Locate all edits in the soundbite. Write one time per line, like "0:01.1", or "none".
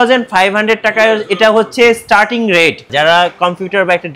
0:02.8